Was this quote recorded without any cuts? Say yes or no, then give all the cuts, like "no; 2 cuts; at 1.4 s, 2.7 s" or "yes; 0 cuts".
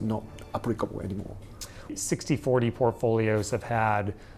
no; 1 cut; at 1.9 s